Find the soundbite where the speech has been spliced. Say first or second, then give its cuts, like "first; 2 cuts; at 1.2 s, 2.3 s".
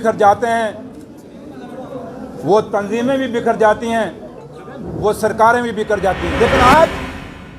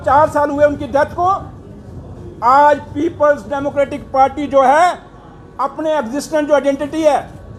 first; 1 cut; at 6.3 s